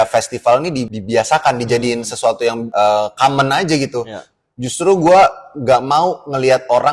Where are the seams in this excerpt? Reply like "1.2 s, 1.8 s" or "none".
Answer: 0.9 s, 2.6 s